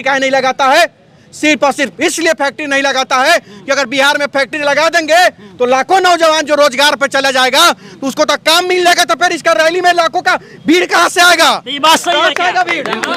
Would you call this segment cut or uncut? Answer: uncut